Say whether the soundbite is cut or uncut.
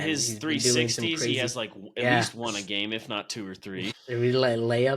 cut